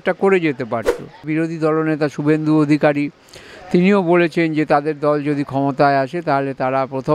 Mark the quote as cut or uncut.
cut